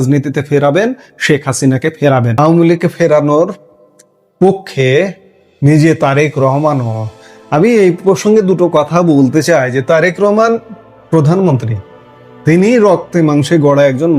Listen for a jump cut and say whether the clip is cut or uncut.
cut